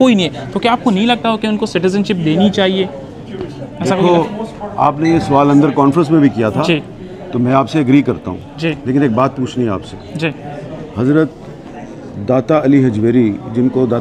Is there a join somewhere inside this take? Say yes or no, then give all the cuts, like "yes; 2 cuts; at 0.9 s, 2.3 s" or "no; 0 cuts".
no; 0 cuts